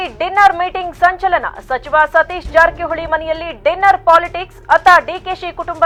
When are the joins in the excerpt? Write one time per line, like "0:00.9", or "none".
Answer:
none